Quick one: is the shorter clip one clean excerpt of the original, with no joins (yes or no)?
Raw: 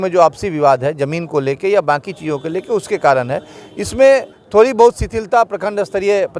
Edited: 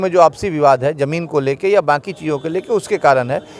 yes